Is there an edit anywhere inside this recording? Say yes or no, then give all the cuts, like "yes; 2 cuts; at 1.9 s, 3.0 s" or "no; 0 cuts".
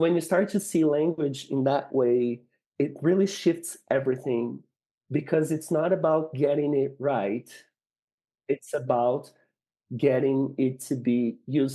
no; 0 cuts